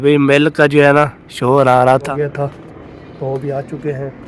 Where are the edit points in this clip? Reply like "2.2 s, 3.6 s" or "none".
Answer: 2.1 s